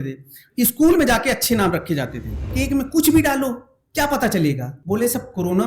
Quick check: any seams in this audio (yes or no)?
yes